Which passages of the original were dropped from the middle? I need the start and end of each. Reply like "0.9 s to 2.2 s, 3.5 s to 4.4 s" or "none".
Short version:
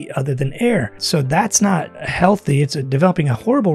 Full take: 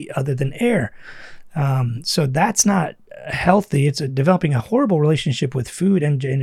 1.0 s to 2.0 s, 3.0 s to 3.2 s